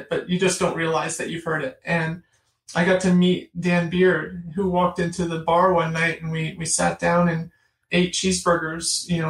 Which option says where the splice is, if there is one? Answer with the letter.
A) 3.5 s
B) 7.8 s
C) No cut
B